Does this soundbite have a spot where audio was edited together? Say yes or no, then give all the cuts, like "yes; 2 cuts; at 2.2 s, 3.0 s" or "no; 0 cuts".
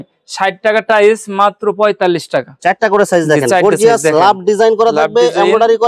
yes; 1 cut; at 2.5 s